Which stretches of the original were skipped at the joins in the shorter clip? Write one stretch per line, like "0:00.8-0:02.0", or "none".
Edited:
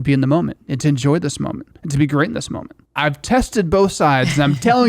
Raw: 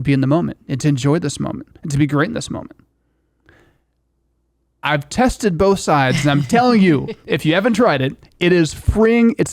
0:02.8-0:04.6